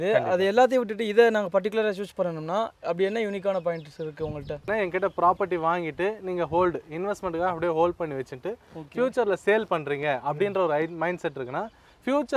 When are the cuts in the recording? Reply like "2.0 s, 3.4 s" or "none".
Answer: 4.7 s